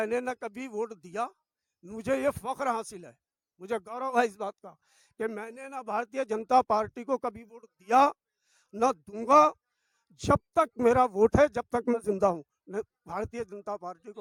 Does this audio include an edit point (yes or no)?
no